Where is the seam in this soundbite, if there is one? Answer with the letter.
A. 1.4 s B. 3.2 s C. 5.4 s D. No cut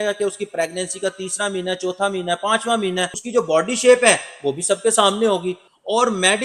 B